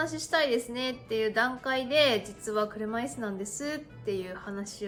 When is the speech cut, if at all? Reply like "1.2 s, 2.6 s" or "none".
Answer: none